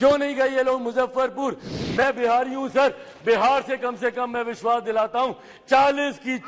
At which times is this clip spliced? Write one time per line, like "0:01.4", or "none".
0:01.7

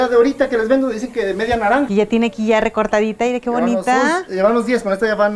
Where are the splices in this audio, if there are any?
0:01.9

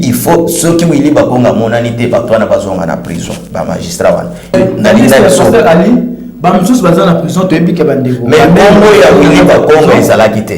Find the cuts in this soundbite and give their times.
0:04.5

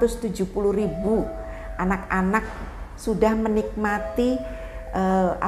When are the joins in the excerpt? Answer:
none

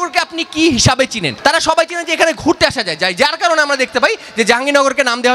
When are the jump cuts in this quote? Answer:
0:01.3

